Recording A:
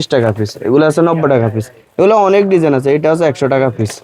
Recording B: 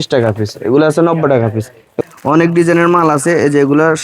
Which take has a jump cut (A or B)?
B